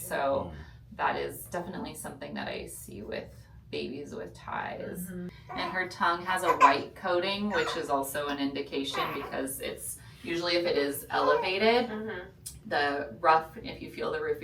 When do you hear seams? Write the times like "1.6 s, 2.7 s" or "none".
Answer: 5.4 s